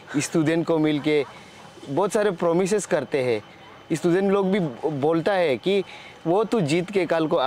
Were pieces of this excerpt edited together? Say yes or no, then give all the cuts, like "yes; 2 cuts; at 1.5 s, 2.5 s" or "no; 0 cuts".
no; 0 cuts